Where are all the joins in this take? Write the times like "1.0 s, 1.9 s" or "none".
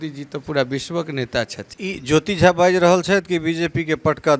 1.6 s